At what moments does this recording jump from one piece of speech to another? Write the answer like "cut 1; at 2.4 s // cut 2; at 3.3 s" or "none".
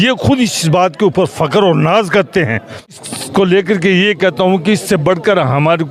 cut 1; at 3.0 s